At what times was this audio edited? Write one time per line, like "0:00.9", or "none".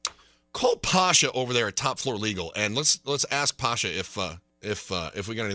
0:04.5

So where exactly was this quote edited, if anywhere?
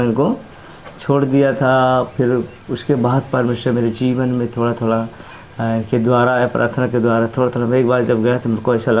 none

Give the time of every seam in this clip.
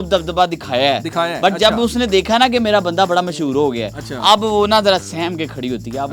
none

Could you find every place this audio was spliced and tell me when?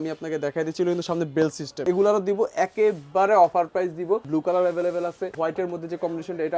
0:01.8
0:04.3
0:05.3

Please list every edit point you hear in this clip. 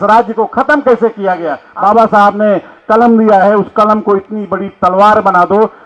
0:01.6

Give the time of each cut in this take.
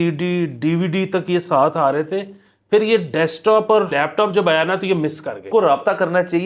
0:03.9
0:05.5

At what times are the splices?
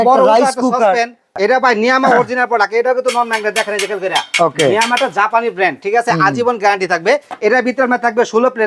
0:01.4
0:07.3

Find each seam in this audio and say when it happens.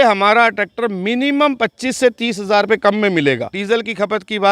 0:03.5

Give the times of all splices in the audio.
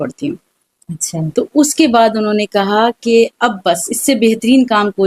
none

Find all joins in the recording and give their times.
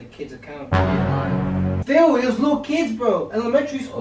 0:01.8

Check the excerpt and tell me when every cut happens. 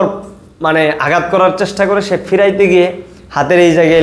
none

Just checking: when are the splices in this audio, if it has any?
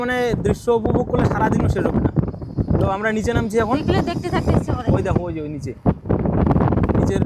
none

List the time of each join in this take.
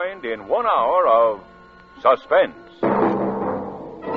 none

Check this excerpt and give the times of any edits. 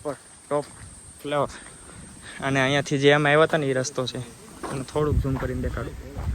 none

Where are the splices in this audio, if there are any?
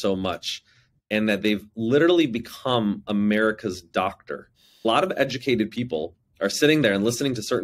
0:04.8

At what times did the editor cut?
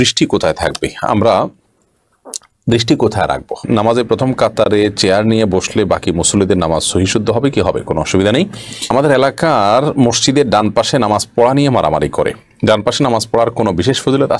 0:03.6
0:08.9

